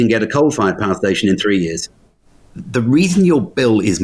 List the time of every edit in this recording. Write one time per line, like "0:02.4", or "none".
0:02.5